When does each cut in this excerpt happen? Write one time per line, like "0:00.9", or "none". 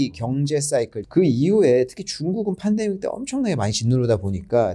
0:01.0